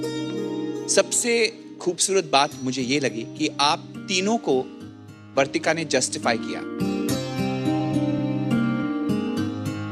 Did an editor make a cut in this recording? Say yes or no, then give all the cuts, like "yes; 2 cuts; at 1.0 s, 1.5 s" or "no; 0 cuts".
no; 0 cuts